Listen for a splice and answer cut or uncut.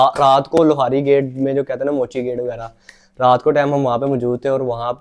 uncut